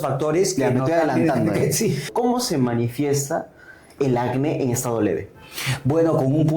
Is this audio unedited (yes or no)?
no